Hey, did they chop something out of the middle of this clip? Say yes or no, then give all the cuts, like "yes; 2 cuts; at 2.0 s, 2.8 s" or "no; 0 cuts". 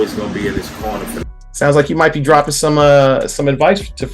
yes; 1 cut; at 1.4 s